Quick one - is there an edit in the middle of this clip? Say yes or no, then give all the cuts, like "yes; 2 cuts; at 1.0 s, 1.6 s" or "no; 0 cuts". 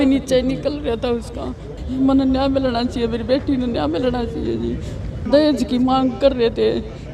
yes; 2 cuts; at 1.8 s, 5.3 s